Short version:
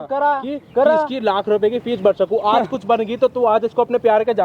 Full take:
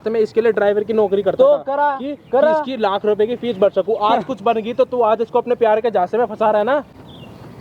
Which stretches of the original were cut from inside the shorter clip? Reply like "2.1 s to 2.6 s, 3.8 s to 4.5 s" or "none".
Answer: none

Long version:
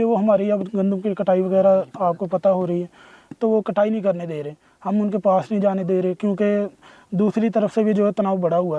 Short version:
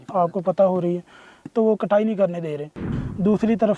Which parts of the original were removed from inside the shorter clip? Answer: 4.7 s to 6.8 s

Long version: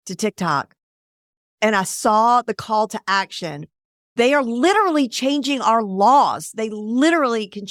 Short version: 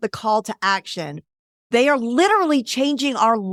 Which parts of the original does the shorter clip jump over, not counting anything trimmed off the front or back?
none

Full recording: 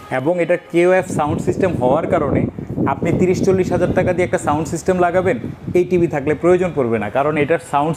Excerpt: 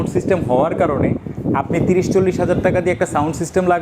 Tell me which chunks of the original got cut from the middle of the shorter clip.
none

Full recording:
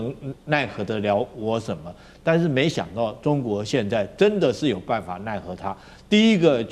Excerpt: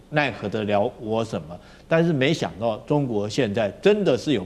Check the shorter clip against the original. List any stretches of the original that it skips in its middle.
none

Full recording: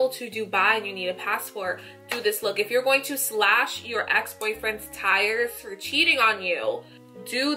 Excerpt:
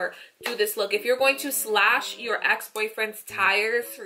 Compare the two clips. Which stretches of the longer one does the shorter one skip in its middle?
none

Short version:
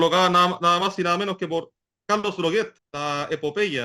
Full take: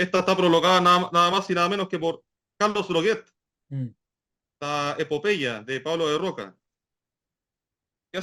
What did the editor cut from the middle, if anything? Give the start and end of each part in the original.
3.3 s to 4.5 s

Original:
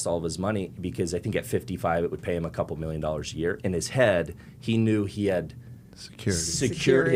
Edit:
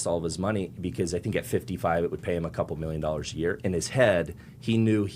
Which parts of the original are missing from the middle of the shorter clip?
none

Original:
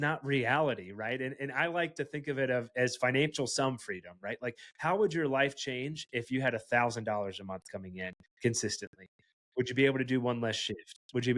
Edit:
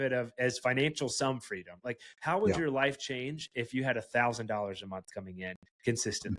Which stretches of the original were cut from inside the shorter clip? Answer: 4.1 s to 4.3 s

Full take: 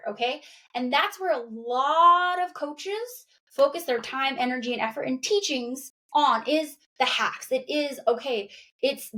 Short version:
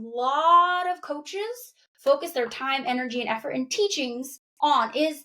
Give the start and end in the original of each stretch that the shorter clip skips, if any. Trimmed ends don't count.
none

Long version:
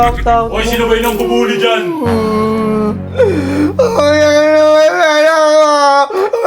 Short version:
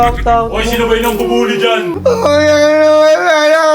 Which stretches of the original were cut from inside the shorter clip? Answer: 2.0 s to 3.7 s

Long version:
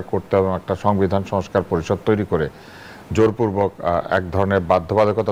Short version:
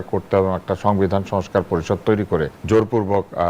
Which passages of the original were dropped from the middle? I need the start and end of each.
2.6 s to 3.0 s

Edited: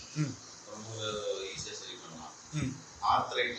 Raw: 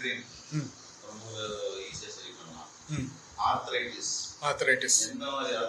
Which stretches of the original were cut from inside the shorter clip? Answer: none

